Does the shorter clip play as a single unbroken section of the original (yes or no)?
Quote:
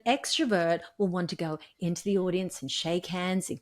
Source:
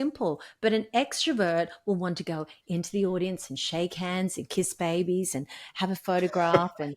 yes